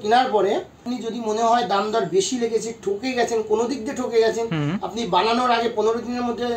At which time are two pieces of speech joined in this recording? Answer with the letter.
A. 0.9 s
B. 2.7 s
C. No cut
A